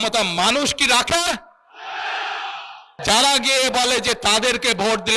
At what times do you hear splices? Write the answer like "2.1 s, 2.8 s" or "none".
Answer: 3.0 s